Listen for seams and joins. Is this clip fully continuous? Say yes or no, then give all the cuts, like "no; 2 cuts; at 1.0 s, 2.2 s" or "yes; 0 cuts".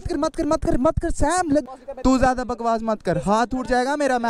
no; 1 cut; at 1.6 s